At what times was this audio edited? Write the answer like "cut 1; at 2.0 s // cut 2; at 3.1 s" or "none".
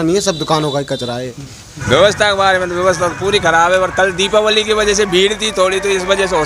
cut 1; at 1.7 s

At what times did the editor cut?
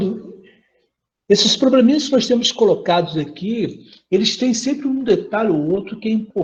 none

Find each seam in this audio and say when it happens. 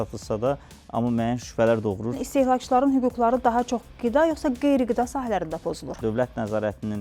cut 1; at 2.2 s // cut 2; at 6.0 s

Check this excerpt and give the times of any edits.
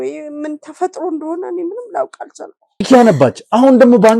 cut 1; at 2.9 s

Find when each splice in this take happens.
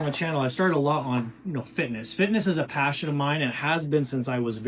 none

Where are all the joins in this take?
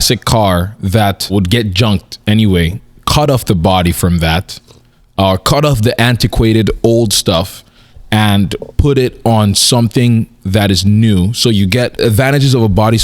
cut 1; at 1.3 s // cut 2; at 11.9 s

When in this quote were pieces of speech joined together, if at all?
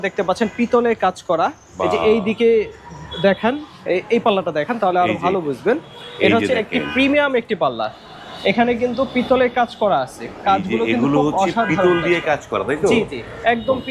none

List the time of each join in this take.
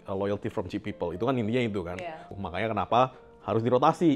cut 1; at 2.3 s

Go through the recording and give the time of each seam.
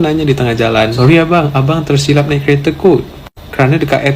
cut 1; at 0.9 s

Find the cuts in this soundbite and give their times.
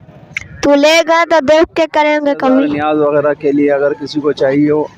cut 1; at 2.7 s

